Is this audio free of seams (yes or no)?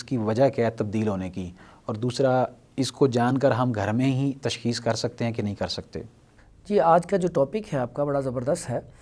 yes